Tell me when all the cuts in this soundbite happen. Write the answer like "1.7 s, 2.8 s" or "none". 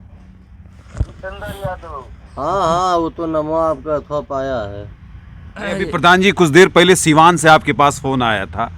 5.7 s

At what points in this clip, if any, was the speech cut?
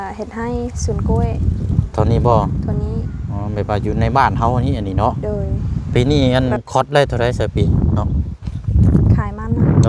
5.7 s

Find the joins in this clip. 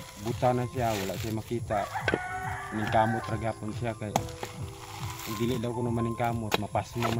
none

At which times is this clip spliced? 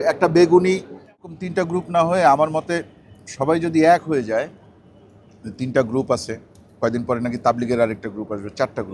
1.2 s

